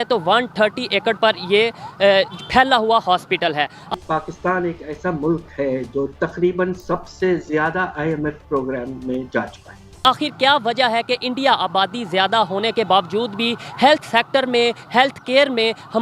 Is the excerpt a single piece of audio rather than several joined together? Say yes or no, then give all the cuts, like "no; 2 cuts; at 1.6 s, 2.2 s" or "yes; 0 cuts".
no; 2 cuts; at 3.9 s, 10.0 s